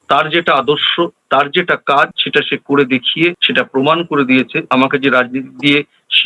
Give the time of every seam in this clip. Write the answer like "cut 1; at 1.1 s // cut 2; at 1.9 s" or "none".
cut 1; at 3.4 s // cut 2; at 4.6 s